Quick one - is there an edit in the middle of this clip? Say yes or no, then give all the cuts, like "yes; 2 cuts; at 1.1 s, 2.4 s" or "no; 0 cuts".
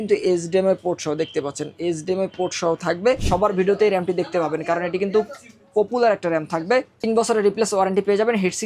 yes; 1 cut; at 3.2 s